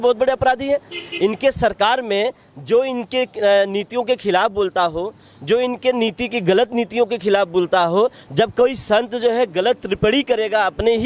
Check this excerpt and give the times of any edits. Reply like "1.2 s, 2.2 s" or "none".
none